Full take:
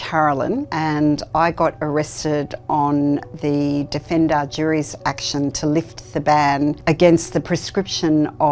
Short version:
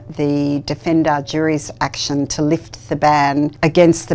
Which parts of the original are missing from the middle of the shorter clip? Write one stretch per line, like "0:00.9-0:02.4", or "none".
none